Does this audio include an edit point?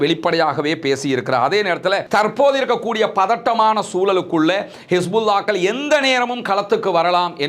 yes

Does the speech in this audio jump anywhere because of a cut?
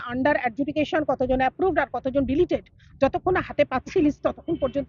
no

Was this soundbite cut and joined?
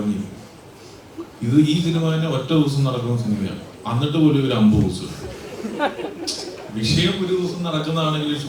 no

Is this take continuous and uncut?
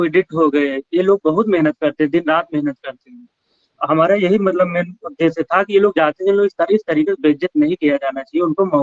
yes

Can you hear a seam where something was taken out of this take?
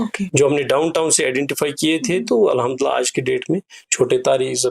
no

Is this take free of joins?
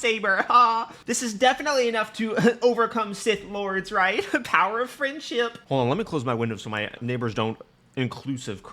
no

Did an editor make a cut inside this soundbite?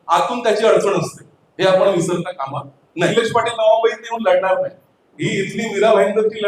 yes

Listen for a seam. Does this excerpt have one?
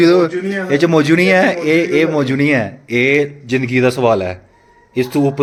no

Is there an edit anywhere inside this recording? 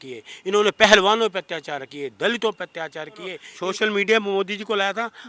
yes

